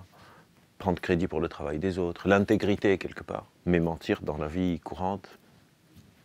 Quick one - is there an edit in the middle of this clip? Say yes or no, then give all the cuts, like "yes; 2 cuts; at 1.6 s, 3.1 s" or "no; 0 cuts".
yes; 1 cut; at 3.5 s